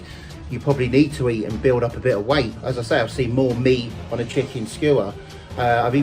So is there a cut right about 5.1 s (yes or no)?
no